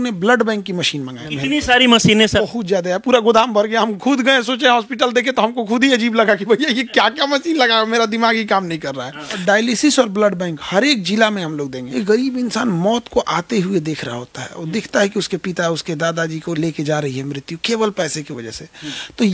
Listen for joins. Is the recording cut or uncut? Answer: cut